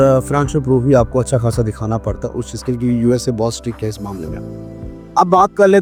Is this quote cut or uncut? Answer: uncut